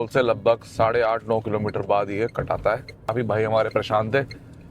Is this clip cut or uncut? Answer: cut